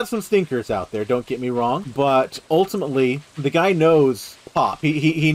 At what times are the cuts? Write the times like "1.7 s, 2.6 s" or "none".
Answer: 1.9 s, 3.3 s, 4.3 s